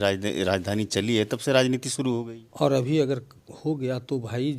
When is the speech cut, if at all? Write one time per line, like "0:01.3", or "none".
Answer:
0:02.4

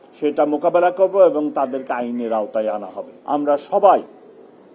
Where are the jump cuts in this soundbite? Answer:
0:03.1

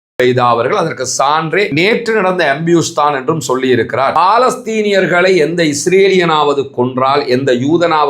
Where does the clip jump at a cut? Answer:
0:01.5
0:04.1

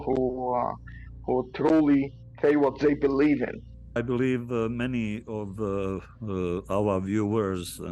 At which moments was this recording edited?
0:04.0

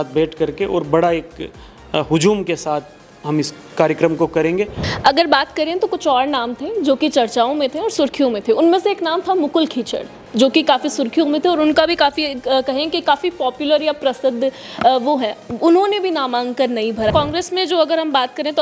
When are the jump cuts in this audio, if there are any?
0:04.9
0:17.1

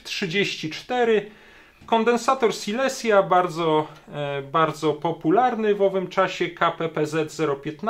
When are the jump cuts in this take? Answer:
0:01.8

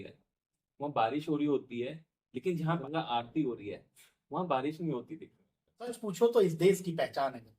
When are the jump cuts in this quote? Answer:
0:02.8
0:06.0

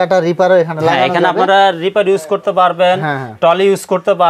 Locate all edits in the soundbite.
none

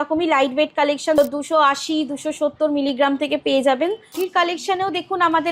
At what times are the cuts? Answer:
0:01.2
0:04.2

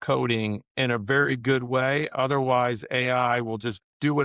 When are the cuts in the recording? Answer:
none

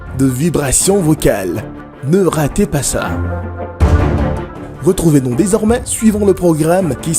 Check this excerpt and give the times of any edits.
0:03.1
0:04.6

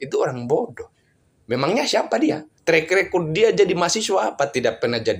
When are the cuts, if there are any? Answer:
0:02.5

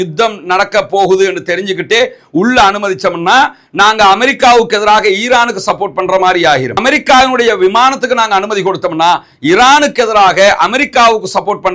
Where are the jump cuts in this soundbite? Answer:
none

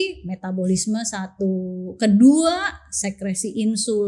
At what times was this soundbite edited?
none

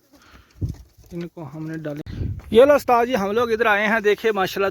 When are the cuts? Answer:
0:02.0

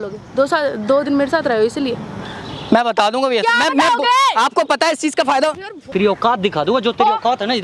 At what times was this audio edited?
0:05.9

